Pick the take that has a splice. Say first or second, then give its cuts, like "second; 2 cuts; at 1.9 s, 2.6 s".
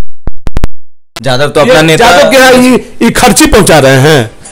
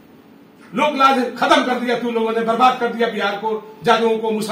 first; 1 cut; at 1.0 s